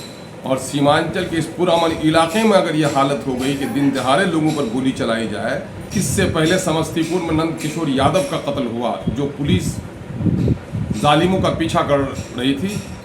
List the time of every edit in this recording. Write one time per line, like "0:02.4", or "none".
0:05.9